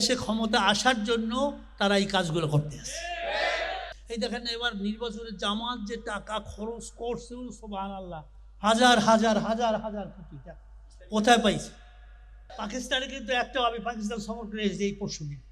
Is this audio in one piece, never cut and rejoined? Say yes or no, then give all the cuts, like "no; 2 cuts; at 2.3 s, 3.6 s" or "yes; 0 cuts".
no; 2 cuts; at 3.8 s, 12.4 s